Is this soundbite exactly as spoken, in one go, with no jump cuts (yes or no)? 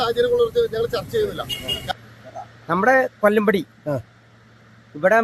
no